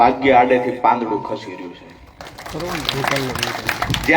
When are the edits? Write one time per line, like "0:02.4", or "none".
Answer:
none